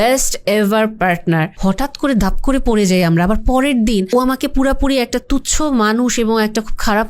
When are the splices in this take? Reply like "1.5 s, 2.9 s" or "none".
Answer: 1.5 s, 4.1 s

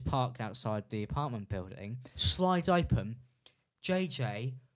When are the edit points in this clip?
2.2 s

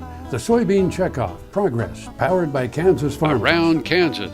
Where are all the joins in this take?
3.4 s

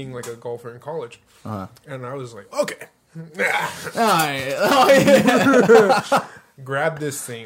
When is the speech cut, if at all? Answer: none

